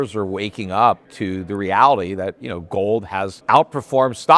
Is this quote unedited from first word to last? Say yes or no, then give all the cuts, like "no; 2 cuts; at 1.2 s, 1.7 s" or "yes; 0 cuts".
no; 2 cuts; at 1.1 s, 3.4 s